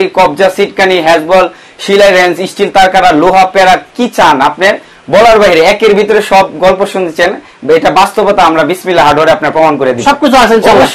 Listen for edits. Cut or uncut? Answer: uncut